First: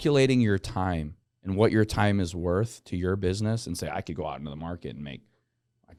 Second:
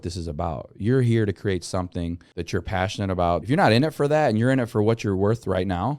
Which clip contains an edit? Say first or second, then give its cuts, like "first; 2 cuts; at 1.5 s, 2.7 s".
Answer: second; 2 cuts; at 2.3 s, 3.4 s